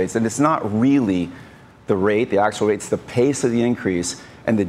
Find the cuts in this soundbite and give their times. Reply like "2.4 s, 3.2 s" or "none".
none